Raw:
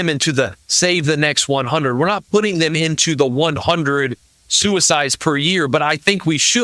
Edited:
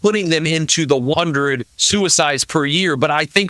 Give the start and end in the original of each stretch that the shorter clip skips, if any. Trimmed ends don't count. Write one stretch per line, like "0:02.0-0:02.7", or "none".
0:03.6-0:04.1

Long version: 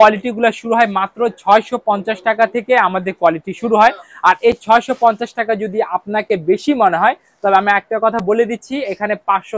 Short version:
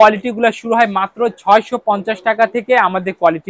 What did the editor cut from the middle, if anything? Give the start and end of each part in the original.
none

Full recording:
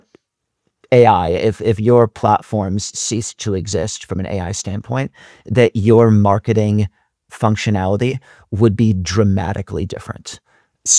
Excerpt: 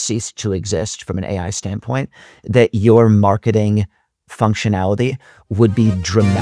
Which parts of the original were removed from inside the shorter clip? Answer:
none

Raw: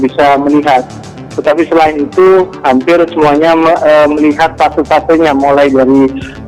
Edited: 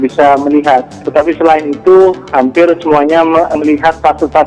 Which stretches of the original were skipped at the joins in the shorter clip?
0:01.0-0:01.3
0:03.9-0:04.1

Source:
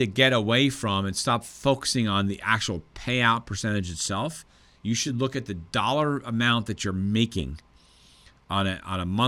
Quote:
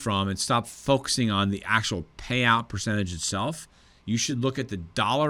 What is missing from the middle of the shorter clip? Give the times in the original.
none

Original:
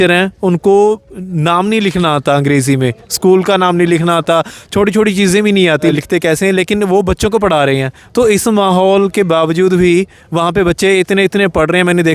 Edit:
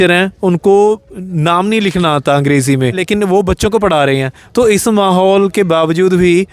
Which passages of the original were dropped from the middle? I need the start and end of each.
0:03.0-0:06.6

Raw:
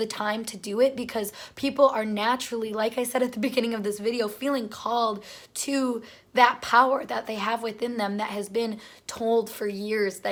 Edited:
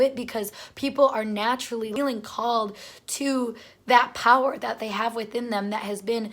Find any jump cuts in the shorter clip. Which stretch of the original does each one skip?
0:02.7-0:04.4

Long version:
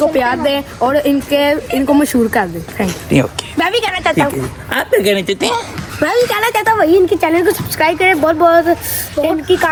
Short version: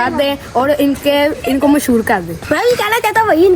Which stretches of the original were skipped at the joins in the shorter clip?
0:02.6-0:05.8

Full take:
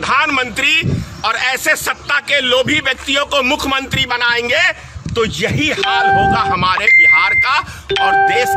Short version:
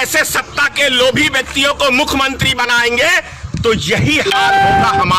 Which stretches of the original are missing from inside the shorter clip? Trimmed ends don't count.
none

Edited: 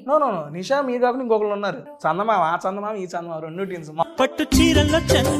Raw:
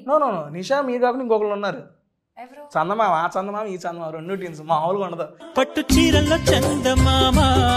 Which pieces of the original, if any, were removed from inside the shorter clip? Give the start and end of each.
0:01.9-0:02.6
0:04.7-0:05.4

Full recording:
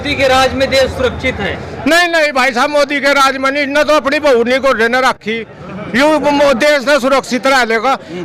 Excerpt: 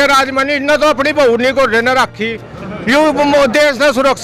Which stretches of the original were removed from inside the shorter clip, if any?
none

